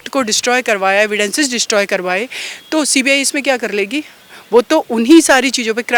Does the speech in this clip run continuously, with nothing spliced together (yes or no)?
yes